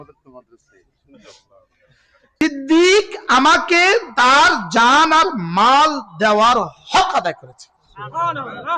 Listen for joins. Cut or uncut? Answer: cut